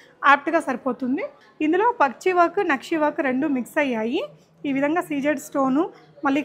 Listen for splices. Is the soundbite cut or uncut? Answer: cut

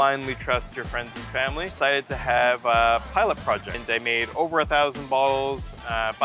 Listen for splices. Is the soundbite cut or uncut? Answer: cut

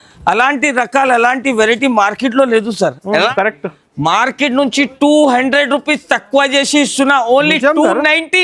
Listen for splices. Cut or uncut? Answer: cut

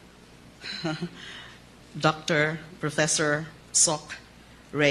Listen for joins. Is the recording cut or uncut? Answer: cut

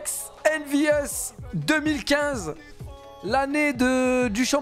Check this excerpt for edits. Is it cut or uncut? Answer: uncut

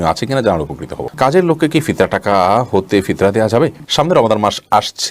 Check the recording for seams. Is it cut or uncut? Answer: cut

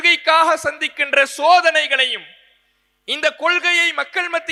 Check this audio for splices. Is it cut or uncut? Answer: uncut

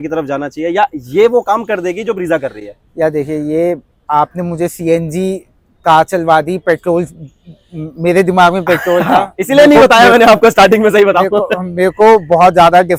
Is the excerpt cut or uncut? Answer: uncut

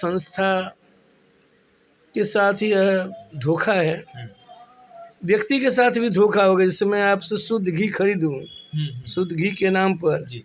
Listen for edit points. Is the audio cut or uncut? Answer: uncut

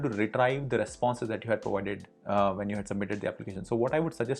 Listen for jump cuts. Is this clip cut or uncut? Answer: uncut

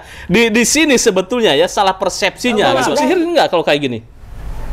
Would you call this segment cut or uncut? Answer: cut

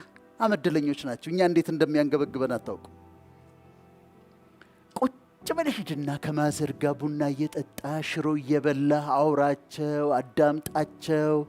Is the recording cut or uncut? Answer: uncut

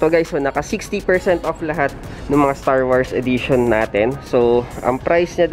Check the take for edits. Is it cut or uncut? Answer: uncut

